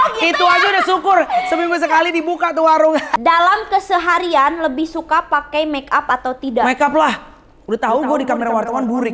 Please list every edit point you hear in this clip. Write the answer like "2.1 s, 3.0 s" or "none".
3.2 s